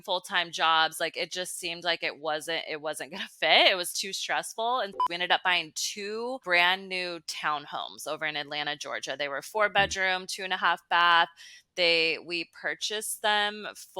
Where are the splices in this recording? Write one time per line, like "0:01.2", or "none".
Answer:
0:04.9